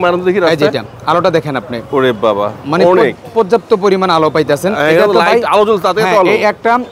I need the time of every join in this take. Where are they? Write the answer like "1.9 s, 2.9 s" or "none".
none